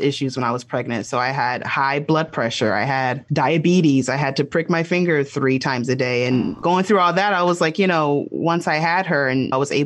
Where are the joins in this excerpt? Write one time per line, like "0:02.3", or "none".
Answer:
none